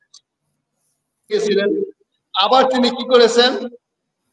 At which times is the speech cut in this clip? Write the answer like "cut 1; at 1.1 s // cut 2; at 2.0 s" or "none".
cut 1; at 1.4 s